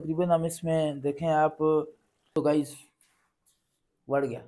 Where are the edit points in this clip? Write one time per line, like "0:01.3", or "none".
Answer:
0:02.3